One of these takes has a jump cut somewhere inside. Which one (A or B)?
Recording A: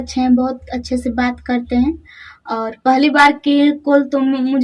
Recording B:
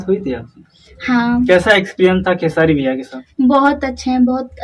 B